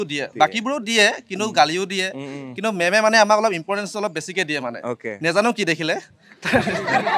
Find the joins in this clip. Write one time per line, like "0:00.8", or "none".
none